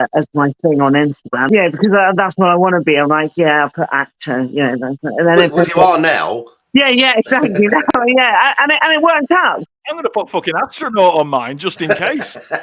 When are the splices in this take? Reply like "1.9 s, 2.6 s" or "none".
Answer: 1.5 s